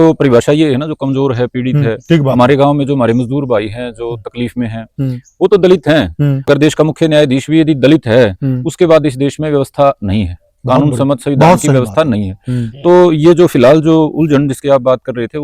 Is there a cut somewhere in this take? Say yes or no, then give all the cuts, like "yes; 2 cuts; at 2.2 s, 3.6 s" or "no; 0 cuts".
yes; 1 cut; at 6.5 s